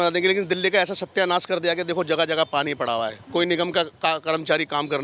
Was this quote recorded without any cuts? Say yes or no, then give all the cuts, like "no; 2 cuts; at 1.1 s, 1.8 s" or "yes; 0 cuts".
yes; 0 cuts